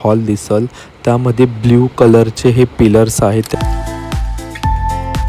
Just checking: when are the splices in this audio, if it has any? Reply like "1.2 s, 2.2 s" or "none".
3.5 s